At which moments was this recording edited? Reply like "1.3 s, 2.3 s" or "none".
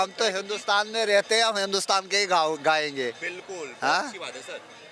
none